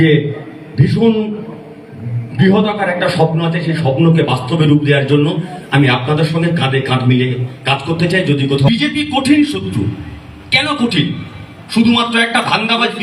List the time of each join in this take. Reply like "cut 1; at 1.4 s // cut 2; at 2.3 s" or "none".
cut 1; at 8.7 s